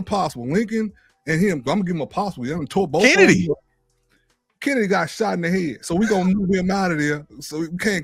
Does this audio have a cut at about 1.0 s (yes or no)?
no